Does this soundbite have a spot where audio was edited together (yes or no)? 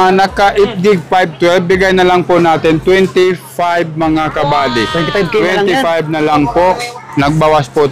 yes